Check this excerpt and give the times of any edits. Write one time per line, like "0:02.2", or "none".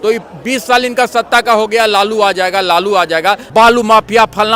0:03.4